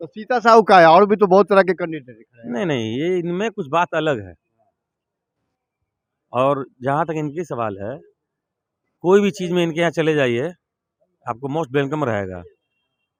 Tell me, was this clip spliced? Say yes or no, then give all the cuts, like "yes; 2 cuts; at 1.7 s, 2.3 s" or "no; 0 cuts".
no; 0 cuts